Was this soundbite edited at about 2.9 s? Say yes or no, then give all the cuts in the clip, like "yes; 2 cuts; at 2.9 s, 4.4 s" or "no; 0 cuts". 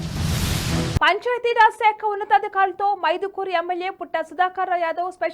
no; 1 cut; at 0.9 s